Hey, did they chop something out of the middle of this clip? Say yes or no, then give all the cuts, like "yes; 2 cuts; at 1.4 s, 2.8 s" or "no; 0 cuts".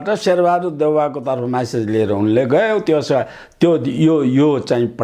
no; 0 cuts